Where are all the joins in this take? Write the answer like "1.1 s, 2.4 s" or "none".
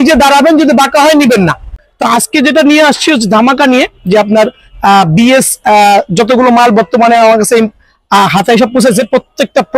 1.7 s